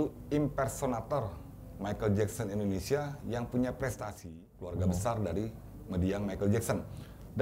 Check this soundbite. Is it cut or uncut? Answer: cut